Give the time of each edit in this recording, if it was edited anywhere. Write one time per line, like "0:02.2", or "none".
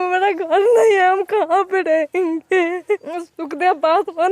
0:03.0